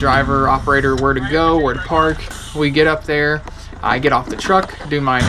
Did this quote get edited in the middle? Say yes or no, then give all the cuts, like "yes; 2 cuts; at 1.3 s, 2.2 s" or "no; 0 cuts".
yes; 1 cut; at 2.4 s